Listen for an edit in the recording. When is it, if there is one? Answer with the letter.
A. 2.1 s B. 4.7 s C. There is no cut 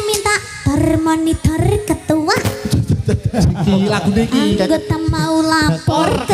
C